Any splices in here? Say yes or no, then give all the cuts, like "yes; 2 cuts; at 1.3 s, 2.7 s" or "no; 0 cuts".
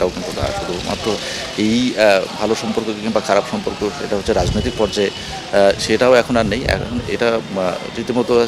no; 0 cuts